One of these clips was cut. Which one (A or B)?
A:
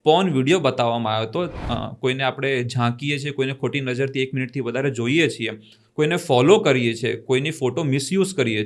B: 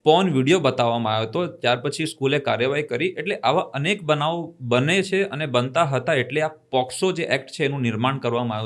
A